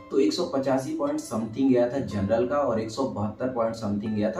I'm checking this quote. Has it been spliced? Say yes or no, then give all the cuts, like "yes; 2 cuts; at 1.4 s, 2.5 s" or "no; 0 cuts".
no; 0 cuts